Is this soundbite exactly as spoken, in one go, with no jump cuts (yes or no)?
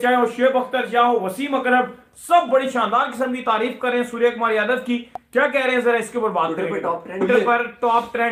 no